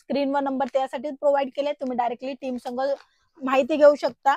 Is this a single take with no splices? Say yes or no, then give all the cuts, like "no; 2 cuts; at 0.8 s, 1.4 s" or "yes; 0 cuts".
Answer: yes; 0 cuts